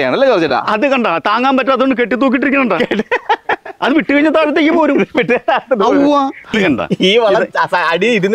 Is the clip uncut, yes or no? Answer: no